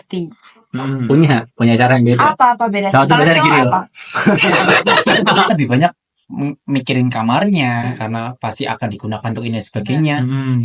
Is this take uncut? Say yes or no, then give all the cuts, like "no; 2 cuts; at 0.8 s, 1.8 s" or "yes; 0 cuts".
no; 1 cut; at 5.5 s